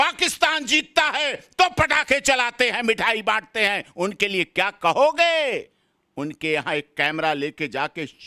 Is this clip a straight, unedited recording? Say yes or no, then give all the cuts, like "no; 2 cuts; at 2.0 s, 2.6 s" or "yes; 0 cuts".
yes; 0 cuts